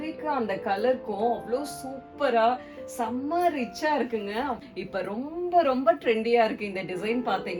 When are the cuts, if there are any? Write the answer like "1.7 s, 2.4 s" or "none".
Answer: 4.6 s